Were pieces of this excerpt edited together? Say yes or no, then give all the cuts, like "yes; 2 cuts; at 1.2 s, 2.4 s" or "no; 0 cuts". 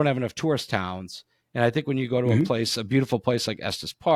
no; 0 cuts